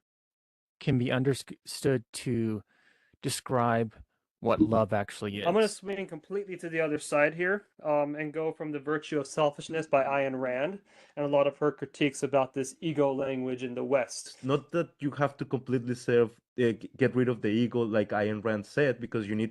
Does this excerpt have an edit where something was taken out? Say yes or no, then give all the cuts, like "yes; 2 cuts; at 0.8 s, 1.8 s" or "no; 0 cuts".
yes; 2 cuts; at 5.4 s, 14.3 s